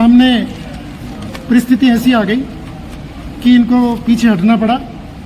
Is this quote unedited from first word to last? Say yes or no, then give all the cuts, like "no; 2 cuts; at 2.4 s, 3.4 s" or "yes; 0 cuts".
yes; 0 cuts